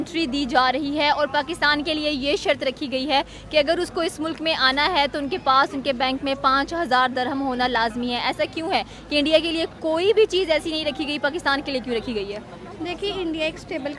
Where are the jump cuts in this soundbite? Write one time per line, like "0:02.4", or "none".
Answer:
none

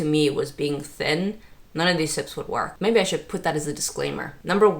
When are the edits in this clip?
0:02.7

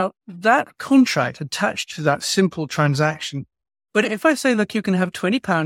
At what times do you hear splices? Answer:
0:04.0

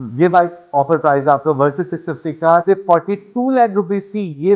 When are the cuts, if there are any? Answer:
0:02.6

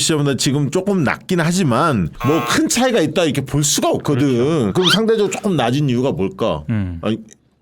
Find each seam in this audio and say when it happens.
0:02.1
0:04.7

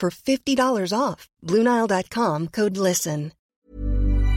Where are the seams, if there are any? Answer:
0:03.4

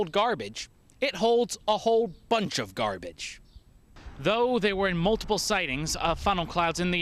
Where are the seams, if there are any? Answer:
0:03.9

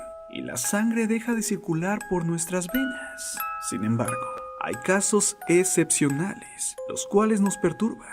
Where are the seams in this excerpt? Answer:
0:03.1

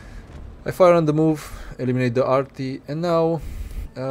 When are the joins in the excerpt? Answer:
none

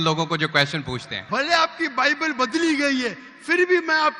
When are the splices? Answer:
0:01.1

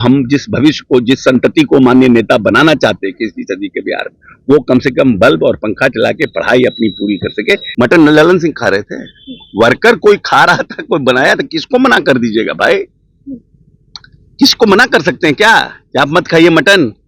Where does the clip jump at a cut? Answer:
0:07.7

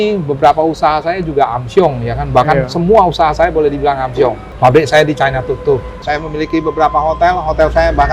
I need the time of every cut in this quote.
0:04.5
0:06.0

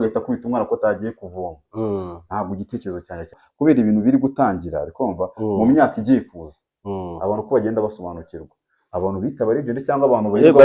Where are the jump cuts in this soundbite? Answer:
0:03.4

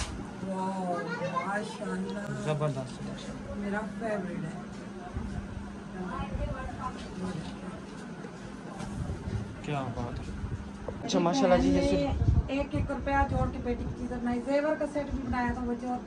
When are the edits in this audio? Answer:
none

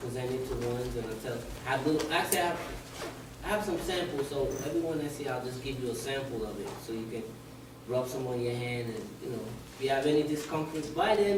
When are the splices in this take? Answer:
none

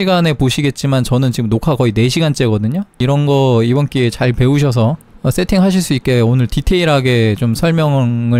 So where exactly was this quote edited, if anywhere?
0:03.0

